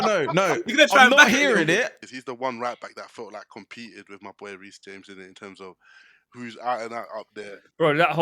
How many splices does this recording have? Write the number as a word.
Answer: one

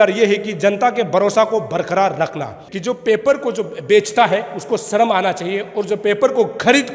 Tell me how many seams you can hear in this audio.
one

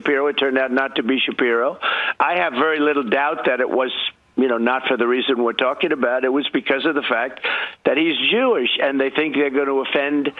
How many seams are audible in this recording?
zero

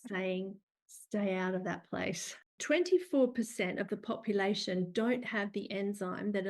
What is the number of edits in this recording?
one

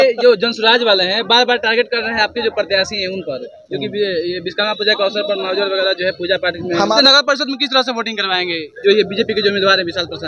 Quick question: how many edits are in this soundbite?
two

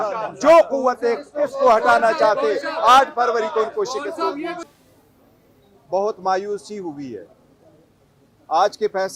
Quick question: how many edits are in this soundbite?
one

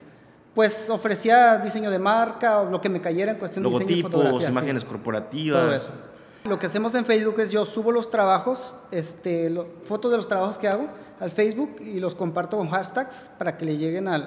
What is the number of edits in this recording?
one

